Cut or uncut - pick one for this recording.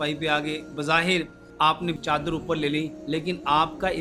cut